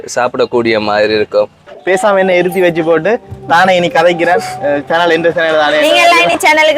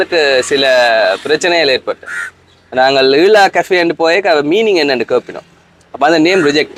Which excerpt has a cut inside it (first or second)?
first